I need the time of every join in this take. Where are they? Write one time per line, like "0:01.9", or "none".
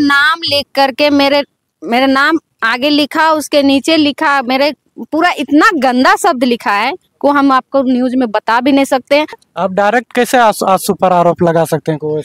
0:09.4

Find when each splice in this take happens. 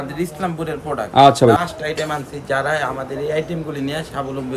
0:01.6

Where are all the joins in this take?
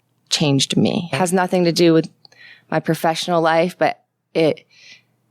0:01.1

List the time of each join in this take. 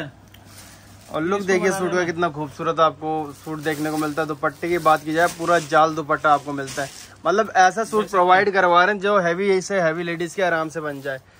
none

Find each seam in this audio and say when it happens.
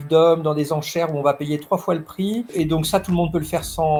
none

